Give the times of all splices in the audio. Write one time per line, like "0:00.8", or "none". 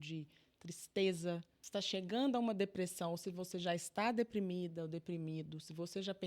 0:01.5